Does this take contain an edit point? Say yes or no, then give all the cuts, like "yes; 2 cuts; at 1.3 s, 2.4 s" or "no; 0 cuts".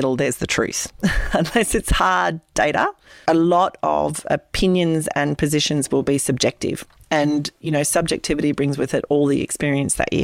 yes; 1 cut; at 3.1 s